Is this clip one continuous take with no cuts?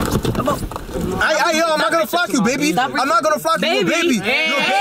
yes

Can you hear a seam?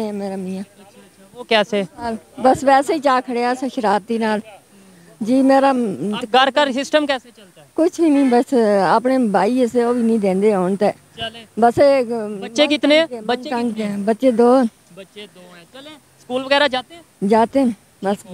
no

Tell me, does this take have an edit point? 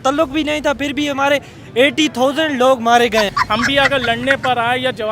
yes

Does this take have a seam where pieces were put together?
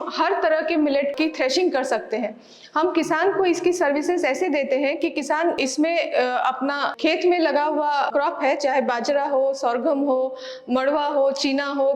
no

